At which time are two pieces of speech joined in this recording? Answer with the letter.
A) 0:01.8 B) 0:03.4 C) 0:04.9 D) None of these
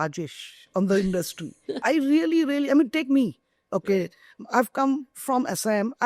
A